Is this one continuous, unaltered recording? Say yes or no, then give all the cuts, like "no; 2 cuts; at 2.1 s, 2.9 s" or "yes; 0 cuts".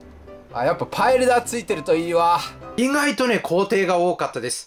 no; 1 cut; at 2.6 s